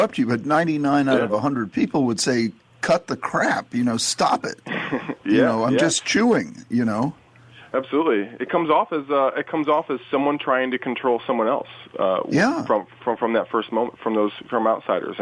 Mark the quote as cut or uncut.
uncut